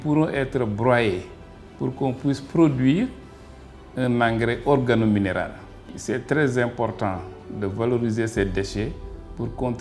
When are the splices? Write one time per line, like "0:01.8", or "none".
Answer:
0:05.9